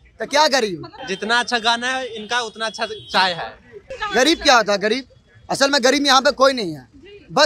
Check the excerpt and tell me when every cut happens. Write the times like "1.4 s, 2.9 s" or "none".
0.9 s, 4.0 s

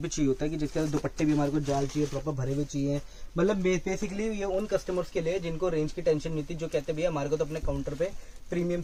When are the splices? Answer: none

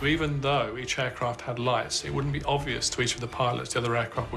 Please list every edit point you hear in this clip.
none

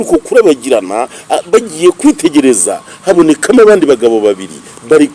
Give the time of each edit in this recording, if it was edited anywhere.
none

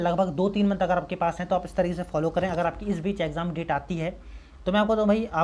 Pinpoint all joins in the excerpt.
none

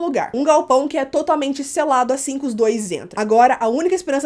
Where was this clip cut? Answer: 3.1 s

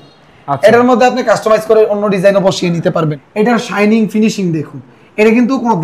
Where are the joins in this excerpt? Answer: 3.2 s

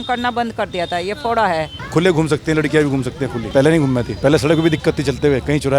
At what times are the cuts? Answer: 1.8 s, 3.4 s, 4.1 s

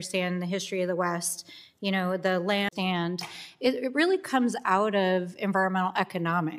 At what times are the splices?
none

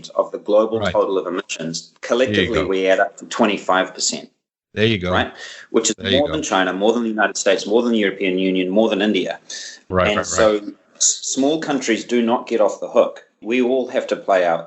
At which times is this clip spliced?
13.4 s

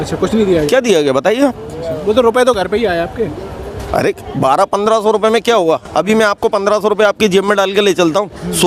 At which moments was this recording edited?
none

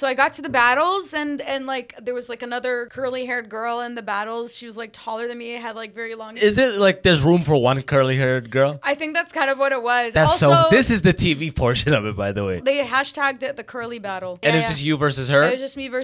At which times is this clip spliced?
2.9 s, 6.4 s, 12.6 s, 14.4 s

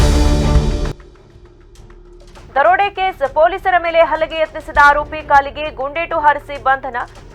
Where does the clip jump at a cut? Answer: none

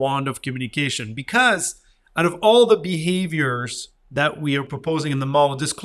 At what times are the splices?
none

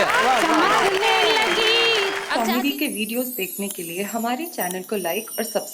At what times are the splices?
2.2 s

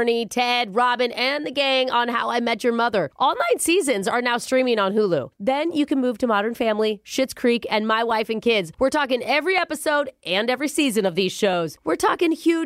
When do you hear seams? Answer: none

